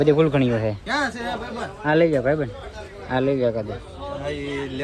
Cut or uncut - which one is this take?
uncut